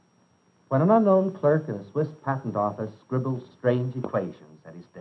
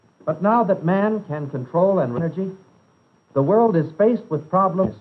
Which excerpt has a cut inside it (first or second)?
second